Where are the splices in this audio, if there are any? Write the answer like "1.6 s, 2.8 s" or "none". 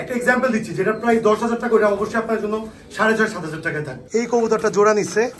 4.0 s